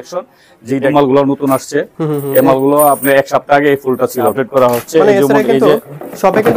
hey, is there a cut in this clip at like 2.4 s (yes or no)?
no